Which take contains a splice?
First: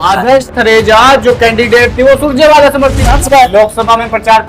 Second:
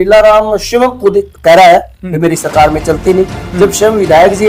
first; 1 cut; at 3.1 s

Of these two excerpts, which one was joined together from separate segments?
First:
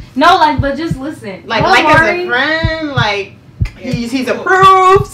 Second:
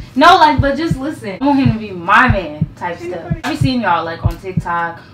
second; 2 cuts; at 1.4 s, 3.5 s

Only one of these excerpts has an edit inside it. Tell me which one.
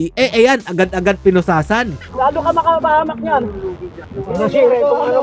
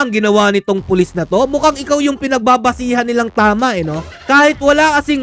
first; 1 cut; at 2.0 s

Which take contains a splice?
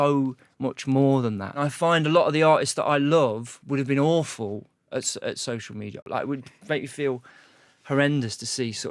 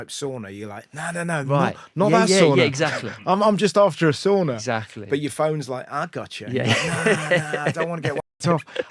first; 2 cuts; at 1.6 s, 6.0 s

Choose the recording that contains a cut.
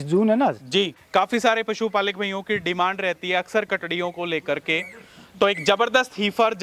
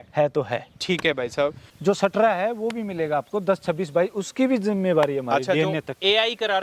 first; 1 cut; at 1.0 s

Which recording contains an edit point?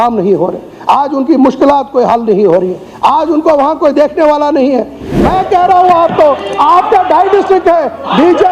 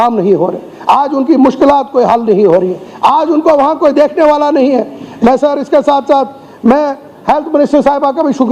first; 1 cut; at 5.2 s

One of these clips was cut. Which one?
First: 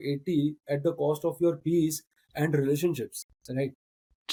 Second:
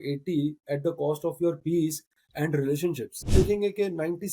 second; 1 cut; at 3.3 s

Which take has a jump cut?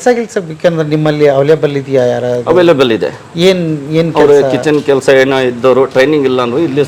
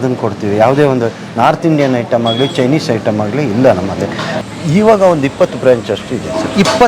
second; 1 cut; at 4.3 s

